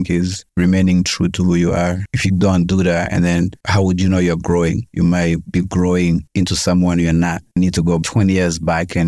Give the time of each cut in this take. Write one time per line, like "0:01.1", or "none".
0:07.4